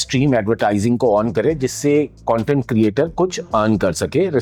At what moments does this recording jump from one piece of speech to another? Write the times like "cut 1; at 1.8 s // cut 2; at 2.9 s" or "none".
none